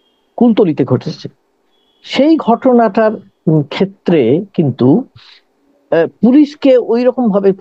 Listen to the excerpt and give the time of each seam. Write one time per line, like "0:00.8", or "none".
none